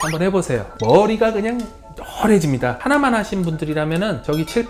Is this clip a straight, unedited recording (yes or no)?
no